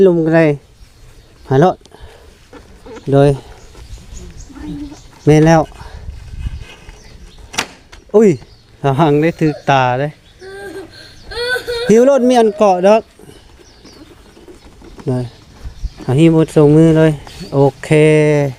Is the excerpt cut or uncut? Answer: uncut